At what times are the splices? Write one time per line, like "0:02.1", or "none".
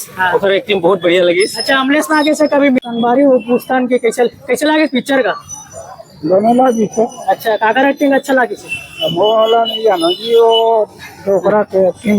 0:02.8